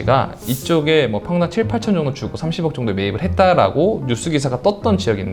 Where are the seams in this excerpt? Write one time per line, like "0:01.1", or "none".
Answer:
none